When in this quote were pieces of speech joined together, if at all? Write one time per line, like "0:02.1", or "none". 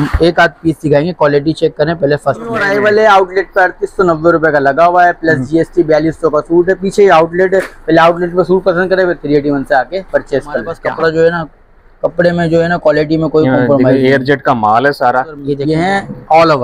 0:02.6
0:10.7
0:15.5

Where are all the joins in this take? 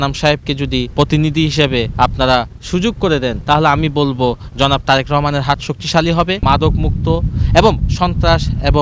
0:00.9
0:01.9
0:03.4
0:06.4

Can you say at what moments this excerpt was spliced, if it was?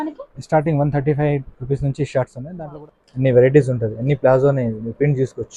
0:02.4

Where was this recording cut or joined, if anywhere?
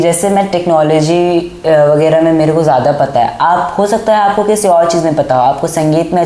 none

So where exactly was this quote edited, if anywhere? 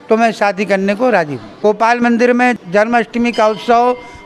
0:01.5
0:02.6

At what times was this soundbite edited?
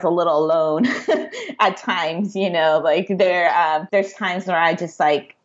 0:03.9

